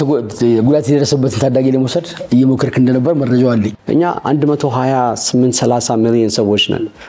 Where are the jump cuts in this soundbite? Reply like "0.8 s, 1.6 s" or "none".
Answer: 3.8 s